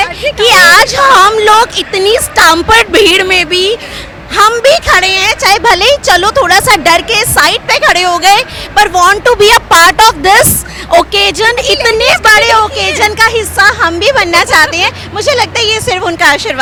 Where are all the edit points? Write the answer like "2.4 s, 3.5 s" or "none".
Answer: none